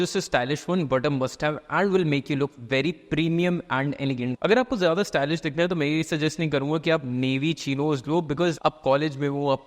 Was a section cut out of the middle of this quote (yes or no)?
yes